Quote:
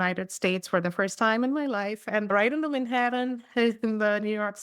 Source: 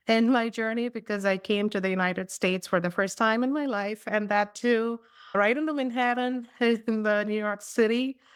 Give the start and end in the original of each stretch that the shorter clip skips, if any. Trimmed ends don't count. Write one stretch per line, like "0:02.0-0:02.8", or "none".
0:04.2-0:05.3